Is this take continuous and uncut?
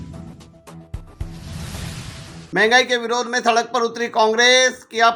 yes; 0 cuts

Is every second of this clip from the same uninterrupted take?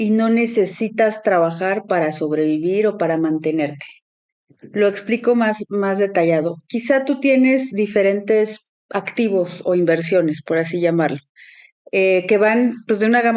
yes; 0 cuts

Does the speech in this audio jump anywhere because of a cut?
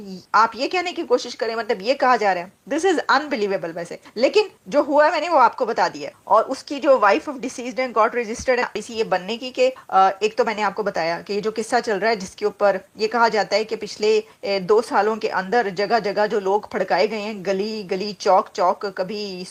no; 0 cuts

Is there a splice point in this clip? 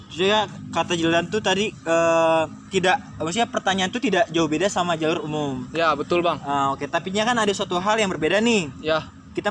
no; 0 cuts

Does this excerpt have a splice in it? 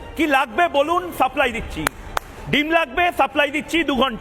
no; 0 cuts

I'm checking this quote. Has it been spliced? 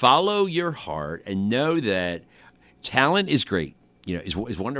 yes; 1 cut; at 2.5 s

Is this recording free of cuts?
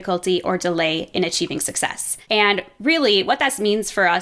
no; 1 cut; at 2.1 s

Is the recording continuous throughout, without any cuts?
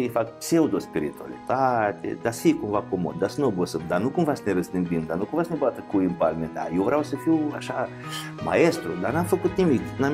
yes; 0 cuts

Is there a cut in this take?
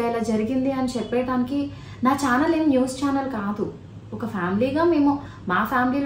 no; 0 cuts

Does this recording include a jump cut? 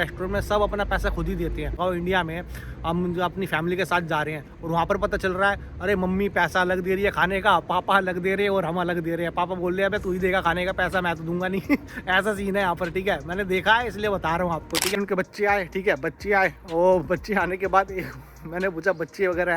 yes; 2 cuts; at 1.8 s, 15.0 s

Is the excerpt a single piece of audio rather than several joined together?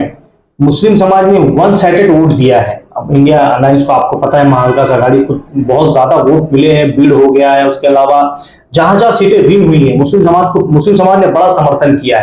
yes; 0 cuts

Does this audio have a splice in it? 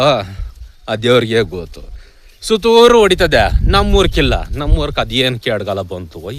no; 0 cuts

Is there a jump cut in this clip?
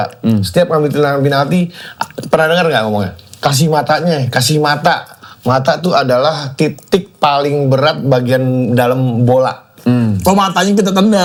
no; 0 cuts

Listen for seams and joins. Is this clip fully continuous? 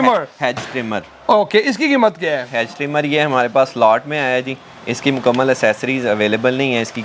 yes; 0 cuts

